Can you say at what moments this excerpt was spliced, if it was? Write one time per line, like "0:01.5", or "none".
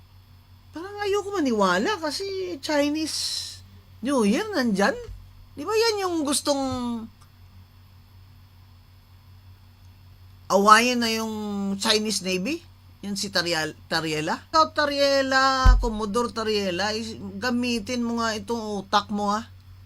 0:14.5